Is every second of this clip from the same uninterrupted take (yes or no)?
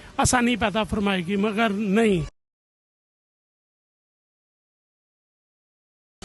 yes